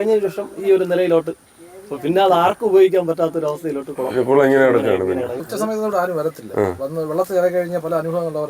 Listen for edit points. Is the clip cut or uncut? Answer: cut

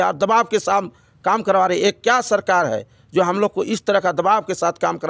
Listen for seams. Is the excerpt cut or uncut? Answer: uncut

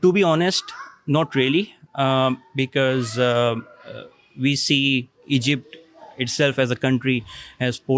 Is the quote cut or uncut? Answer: uncut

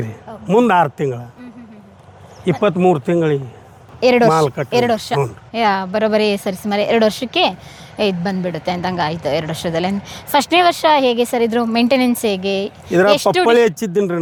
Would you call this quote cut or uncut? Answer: uncut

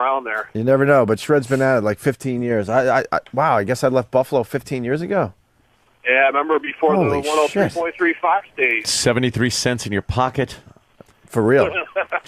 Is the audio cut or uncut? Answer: uncut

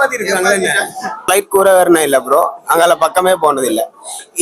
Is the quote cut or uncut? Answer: cut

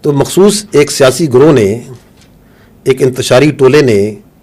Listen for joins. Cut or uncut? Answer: uncut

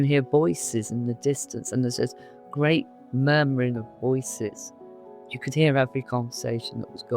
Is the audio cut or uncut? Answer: cut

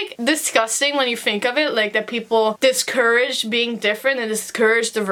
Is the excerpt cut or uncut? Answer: uncut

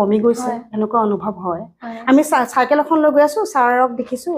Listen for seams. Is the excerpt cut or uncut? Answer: uncut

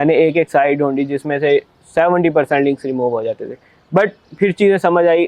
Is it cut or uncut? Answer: uncut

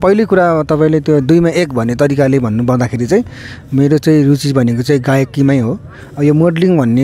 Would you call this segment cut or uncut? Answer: uncut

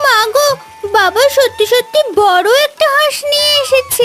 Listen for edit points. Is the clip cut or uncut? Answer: uncut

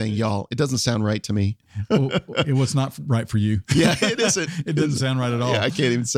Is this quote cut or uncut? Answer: uncut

